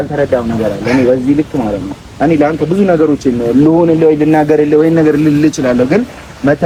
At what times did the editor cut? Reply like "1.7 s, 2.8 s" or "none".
none